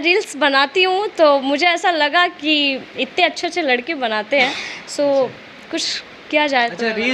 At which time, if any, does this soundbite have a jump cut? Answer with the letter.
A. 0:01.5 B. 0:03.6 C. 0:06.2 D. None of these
D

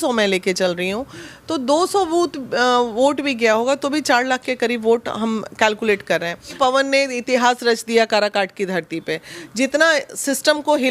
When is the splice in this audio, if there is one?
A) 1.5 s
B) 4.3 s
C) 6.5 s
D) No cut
C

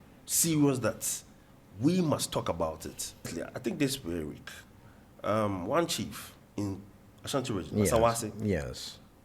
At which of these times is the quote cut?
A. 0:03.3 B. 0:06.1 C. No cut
A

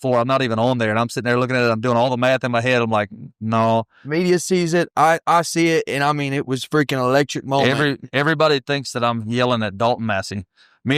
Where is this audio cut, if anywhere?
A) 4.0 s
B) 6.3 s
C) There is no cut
A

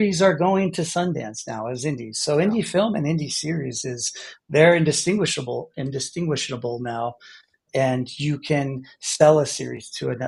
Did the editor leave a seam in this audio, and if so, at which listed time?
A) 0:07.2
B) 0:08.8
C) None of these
C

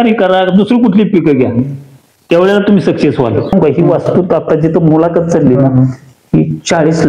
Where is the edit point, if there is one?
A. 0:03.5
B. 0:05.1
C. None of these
A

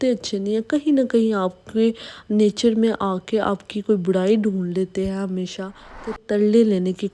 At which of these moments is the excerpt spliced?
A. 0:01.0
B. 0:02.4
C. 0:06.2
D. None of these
C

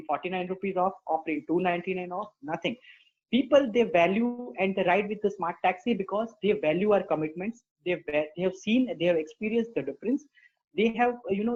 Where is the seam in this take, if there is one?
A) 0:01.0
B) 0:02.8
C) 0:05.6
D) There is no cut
D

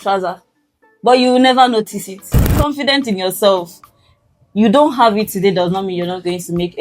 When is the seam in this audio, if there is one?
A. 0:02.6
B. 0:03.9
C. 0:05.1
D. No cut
A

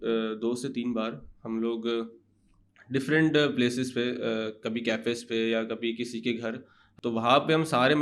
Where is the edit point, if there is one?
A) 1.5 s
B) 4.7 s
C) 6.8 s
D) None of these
C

